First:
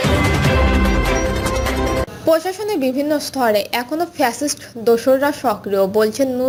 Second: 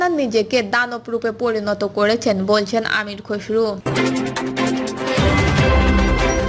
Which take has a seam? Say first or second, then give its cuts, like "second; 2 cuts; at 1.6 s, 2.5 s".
second; 1 cut; at 3.8 s